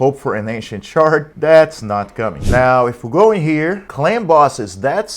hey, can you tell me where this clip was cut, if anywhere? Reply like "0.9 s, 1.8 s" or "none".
2.4 s